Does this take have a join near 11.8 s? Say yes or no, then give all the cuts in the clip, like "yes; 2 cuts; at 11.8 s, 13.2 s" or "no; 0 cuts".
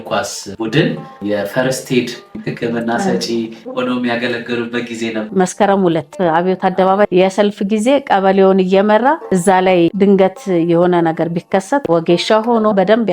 yes; 2 cuts; at 5.2 s, 11.8 s